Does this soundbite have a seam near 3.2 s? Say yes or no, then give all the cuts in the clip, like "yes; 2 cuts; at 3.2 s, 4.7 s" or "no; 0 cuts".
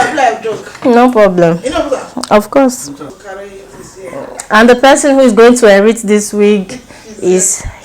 yes; 1 cut; at 3.2 s